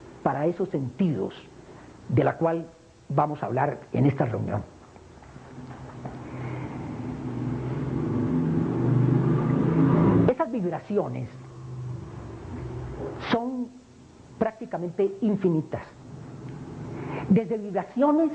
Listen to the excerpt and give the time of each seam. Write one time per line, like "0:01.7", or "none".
0:08.2